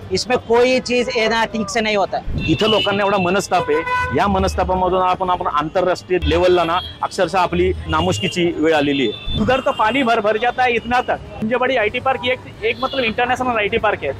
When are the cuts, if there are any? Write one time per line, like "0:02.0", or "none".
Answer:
0:02.3
0:06.2
0:07.9
0:09.2
0:11.3